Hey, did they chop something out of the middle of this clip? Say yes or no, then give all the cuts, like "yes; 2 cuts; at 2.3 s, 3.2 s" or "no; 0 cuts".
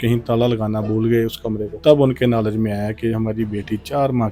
yes; 1 cut; at 1.8 s